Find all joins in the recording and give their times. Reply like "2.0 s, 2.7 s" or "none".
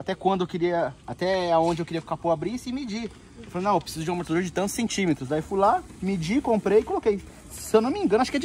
none